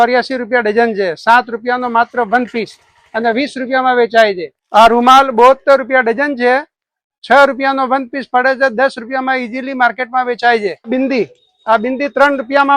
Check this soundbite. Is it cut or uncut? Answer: cut